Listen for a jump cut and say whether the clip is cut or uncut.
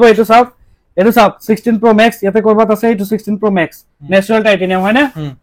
uncut